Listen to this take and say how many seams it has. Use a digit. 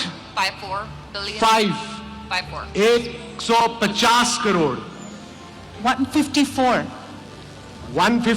0